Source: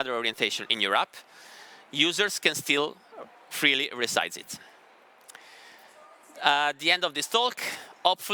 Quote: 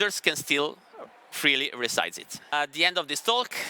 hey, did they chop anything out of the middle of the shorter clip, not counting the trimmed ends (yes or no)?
yes